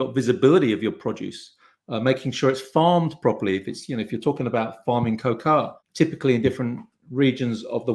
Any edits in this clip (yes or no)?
yes